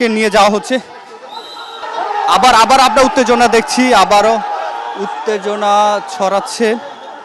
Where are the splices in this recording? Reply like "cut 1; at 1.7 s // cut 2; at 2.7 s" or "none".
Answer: cut 1; at 1.8 s

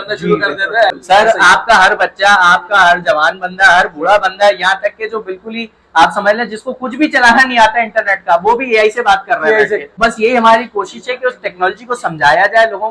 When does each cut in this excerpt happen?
cut 1; at 1.0 s // cut 2; at 9.9 s

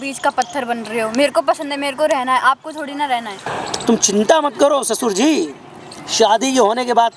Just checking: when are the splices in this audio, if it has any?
cut 1; at 3.5 s

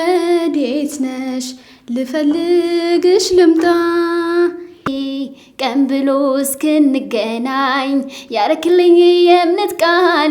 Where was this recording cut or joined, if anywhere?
cut 1; at 4.9 s

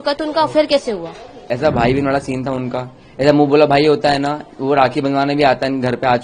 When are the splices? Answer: cut 1; at 1.4 s

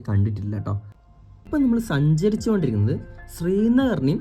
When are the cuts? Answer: cut 1; at 1.6 s

